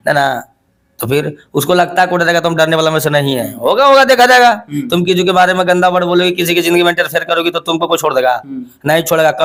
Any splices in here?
no; 0 cuts

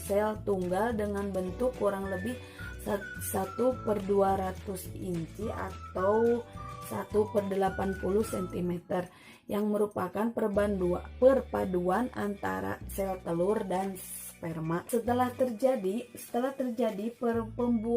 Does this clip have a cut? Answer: yes; 1 cut; at 14.9 s

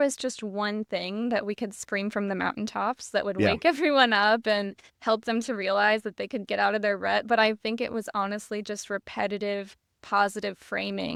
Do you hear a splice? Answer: no; 0 cuts

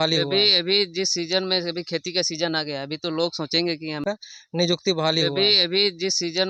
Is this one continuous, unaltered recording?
yes; 0 cuts

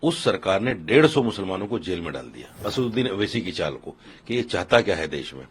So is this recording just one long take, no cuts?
no; 1 cut; at 2.6 s

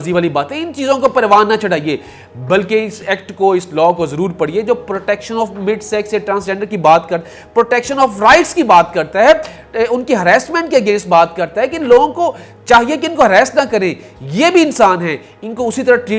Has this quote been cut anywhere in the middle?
no; 0 cuts

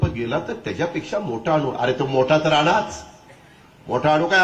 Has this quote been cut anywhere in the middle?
no; 0 cuts

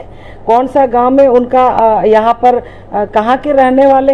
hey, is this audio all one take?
yes; 0 cuts

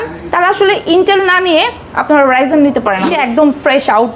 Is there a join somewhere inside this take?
yes; 1 cut; at 3.1 s

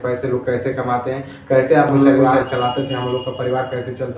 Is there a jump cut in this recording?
yes; 1 cut; at 2.3 s

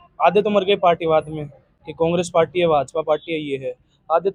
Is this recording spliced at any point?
no; 0 cuts

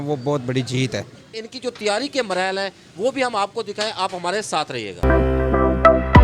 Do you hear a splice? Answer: yes; 1 cut; at 1.5 s

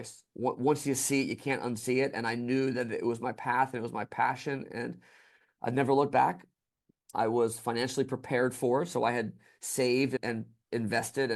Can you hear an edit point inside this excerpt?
no; 0 cuts

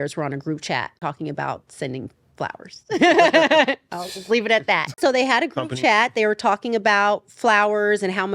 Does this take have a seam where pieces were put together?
yes; 2 cuts; at 0.9 s, 4.9 s

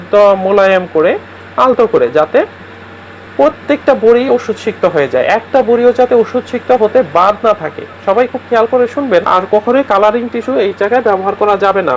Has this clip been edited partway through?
yes; 1 cut; at 9.3 s

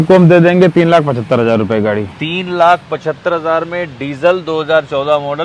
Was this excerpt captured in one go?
yes; 0 cuts

